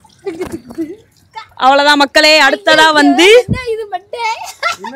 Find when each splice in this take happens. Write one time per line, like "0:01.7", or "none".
0:01.6